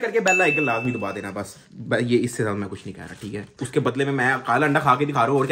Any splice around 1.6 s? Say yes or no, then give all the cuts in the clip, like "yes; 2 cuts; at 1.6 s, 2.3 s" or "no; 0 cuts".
no; 0 cuts